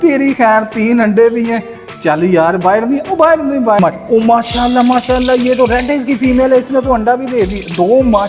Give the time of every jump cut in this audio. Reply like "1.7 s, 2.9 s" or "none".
3.8 s